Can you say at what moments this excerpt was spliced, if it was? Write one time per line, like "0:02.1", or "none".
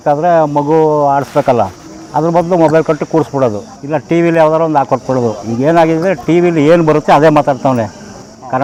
none

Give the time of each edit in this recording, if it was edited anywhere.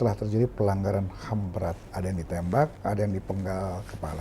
0:01.9

